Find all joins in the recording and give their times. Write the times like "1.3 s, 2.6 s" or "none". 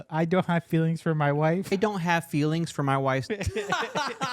1.7 s, 3.2 s